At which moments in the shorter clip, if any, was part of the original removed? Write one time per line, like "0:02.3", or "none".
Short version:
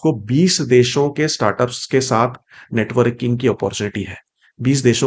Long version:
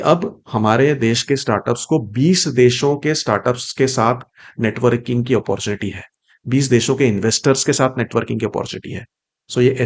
none